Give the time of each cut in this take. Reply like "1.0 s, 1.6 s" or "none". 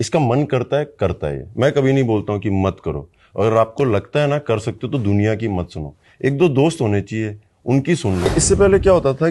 8.3 s